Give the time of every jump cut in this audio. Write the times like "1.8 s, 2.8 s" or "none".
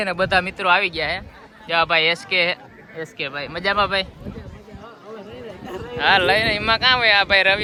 none